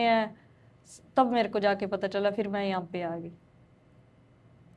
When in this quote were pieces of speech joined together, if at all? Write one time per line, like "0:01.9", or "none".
none